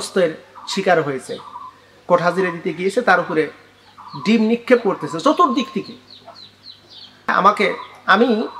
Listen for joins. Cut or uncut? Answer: cut